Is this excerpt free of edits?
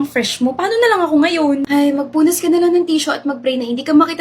no; 1 cut; at 1.6 s

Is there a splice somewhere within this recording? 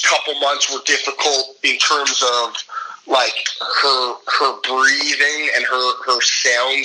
no; 0 cuts

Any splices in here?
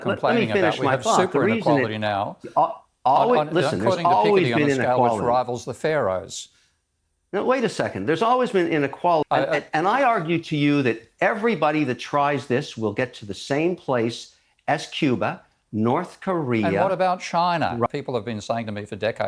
yes; 2 cuts; at 9.2 s, 17.9 s

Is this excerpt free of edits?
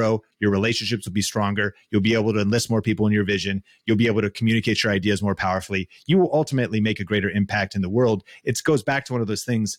yes; 0 cuts

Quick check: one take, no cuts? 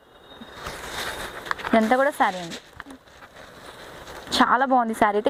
yes; 0 cuts

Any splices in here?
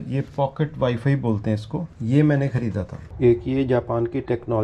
yes; 1 cut; at 3.0 s

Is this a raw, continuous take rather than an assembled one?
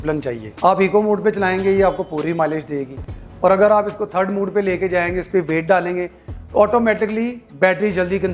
yes; 0 cuts

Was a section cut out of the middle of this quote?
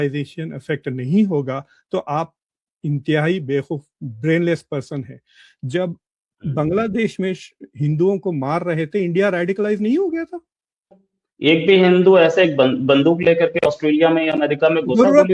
yes; 1 cut; at 11.0 s

